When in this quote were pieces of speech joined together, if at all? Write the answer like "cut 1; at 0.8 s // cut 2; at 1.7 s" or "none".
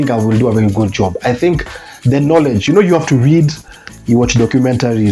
none